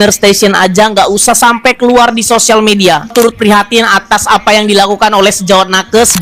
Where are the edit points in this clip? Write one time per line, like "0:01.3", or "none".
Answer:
none